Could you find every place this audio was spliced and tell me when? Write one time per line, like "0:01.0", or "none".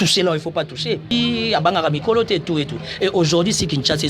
0:01.1